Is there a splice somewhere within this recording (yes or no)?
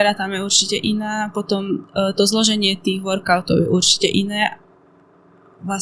no